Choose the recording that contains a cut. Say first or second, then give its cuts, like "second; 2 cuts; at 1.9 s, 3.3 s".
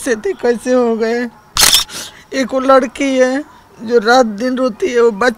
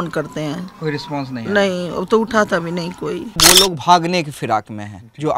second; 1 cut; at 3.3 s